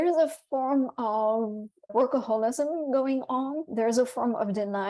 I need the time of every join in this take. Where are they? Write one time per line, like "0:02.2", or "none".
0:03.7